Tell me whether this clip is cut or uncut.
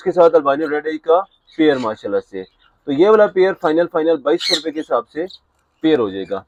uncut